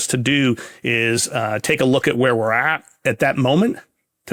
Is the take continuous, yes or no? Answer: yes